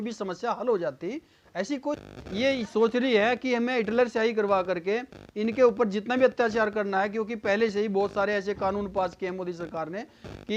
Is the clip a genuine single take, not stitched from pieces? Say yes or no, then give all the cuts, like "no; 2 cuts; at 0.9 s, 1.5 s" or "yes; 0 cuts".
no; 1 cut; at 2.0 s